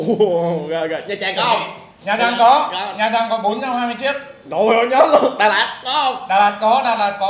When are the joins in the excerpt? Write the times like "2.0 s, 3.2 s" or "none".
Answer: none